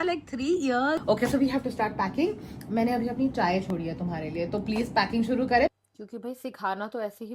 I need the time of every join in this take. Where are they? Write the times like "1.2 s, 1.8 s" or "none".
1.0 s, 5.7 s